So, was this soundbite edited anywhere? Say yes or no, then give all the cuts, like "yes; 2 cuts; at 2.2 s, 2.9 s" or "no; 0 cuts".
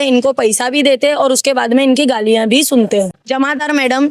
yes; 1 cut; at 3.2 s